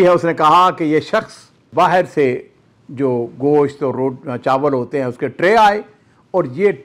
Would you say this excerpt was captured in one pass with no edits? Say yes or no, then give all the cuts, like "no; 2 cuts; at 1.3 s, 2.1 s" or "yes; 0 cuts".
no; 1 cut; at 1.7 s